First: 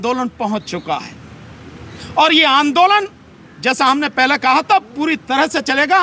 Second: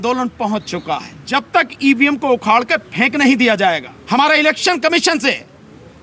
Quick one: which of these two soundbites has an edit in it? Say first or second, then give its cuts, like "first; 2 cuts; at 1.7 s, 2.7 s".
second; 2 cuts; at 1.1 s, 3.9 s